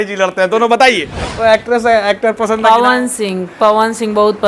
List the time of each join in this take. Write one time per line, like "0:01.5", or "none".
0:01.6